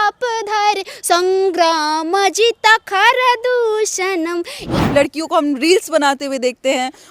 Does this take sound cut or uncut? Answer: cut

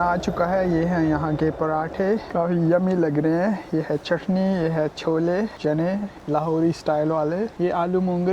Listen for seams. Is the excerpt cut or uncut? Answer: cut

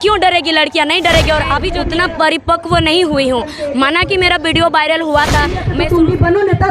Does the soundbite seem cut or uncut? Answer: cut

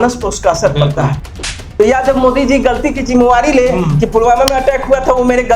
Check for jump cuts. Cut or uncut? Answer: cut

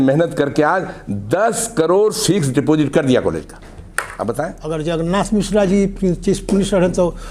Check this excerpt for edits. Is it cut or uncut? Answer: cut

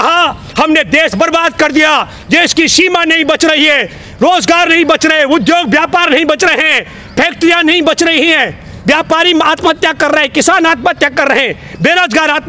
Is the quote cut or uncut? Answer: uncut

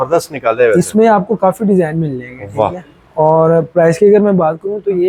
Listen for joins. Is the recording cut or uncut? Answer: uncut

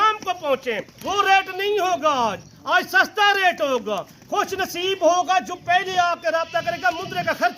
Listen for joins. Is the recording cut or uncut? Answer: cut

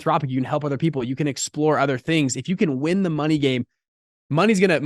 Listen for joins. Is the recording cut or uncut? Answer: uncut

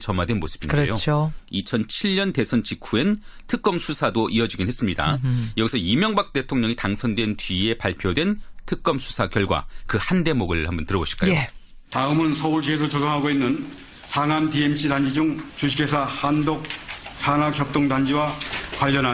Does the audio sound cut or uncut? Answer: uncut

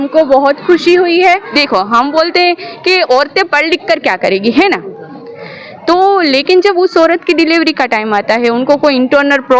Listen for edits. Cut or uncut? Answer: cut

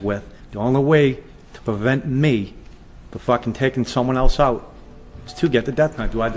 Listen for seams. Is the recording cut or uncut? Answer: uncut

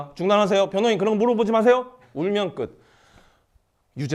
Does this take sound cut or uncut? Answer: uncut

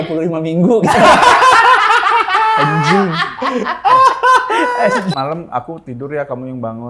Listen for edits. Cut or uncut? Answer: cut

